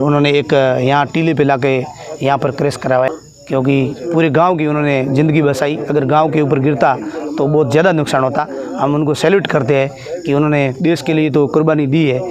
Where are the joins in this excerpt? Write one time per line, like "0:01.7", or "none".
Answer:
0:03.1